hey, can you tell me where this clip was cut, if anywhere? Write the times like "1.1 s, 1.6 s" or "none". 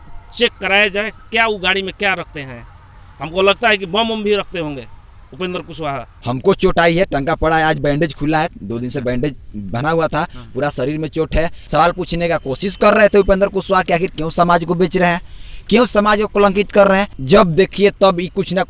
6.1 s, 11.6 s, 17.2 s